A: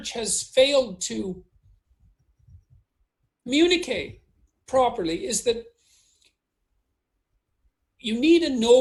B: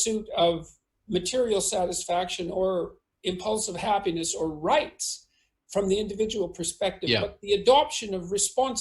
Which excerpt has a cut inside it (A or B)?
B